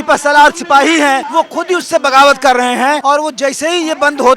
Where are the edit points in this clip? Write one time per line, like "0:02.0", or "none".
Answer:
0:01.3
0:03.0